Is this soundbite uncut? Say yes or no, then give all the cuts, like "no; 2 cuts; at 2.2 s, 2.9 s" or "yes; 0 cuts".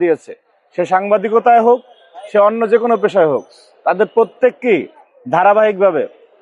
yes; 0 cuts